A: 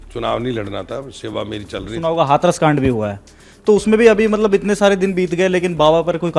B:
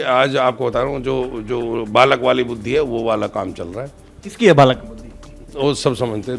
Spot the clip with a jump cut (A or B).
A